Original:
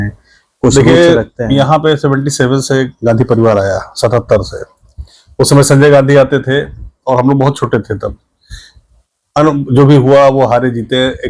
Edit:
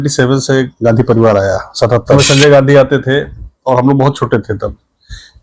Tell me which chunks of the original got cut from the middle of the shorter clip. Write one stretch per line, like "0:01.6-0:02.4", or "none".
0:04.4-0:05.6